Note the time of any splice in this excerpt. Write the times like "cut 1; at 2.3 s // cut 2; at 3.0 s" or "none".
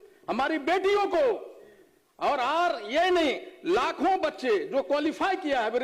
none